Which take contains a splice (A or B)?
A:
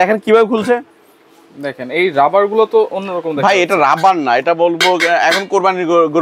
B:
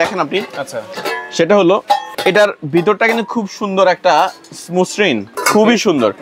B